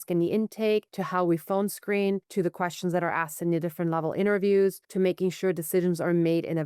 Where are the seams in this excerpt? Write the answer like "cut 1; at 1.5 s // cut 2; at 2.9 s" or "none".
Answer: cut 1; at 1.0 s // cut 2; at 2.3 s // cut 3; at 4.8 s